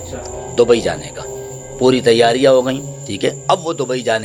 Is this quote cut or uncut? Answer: uncut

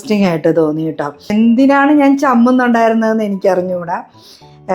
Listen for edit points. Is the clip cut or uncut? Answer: cut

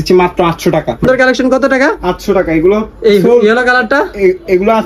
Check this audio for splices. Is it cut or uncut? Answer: cut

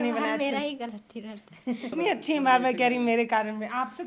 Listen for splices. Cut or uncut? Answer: cut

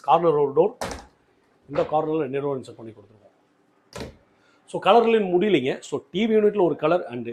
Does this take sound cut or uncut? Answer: uncut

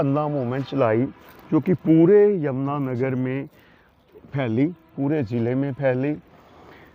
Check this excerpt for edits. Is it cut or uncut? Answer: uncut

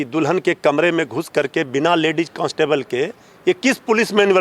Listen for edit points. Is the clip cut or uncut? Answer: uncut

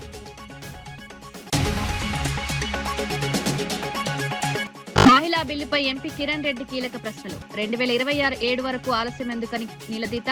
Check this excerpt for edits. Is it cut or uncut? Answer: uncut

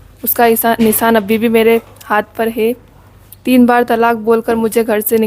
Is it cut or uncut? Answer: cut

